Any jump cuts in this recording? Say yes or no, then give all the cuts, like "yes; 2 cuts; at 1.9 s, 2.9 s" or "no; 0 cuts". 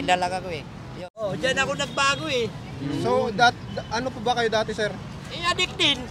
yes; 1 cut; at 1.2 s